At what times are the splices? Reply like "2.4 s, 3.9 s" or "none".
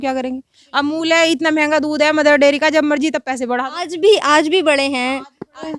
none